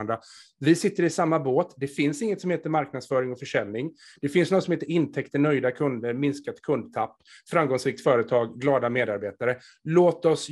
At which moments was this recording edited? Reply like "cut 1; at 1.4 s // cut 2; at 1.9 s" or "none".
none